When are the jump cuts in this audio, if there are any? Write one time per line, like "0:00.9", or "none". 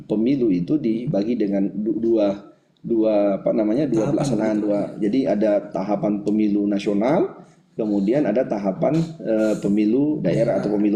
none